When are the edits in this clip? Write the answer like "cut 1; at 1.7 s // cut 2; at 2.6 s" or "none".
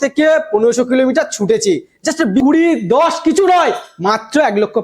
cut 1; at 2.4 s

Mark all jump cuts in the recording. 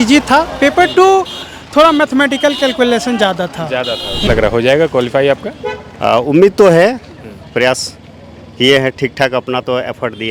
cut 1; at 4.3 s

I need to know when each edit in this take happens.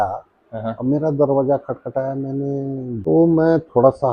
cut 1; at 3.0 s

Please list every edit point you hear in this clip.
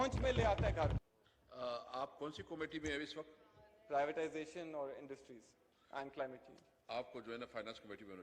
cut 1; at 1.0 s

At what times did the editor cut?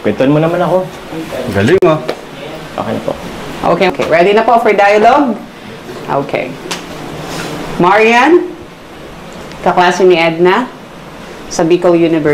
cut 1; at 3.9 s

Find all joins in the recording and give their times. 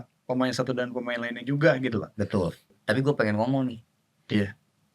cut 1; at 2.7 s

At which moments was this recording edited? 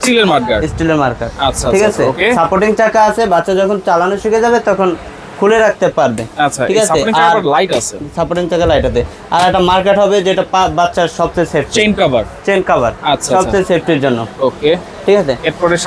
none

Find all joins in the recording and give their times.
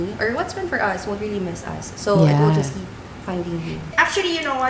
none

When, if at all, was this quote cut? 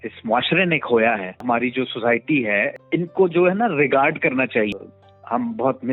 cut 1; at 1.4 s // cut 2; at 2.7 s // cut 3; at 4.7 s

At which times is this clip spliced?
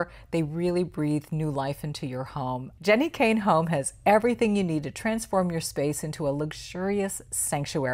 cut 1; at 2.7 s

